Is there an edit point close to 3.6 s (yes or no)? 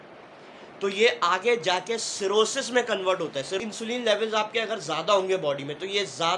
yes